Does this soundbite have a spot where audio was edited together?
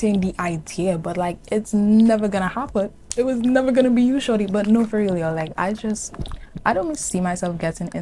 no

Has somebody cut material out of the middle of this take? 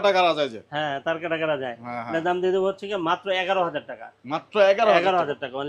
no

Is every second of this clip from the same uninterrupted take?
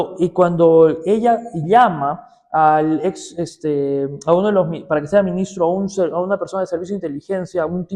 yes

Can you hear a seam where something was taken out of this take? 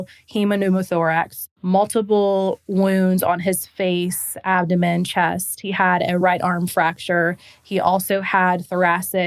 yes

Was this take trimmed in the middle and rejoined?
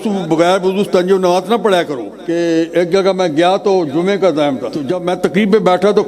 yes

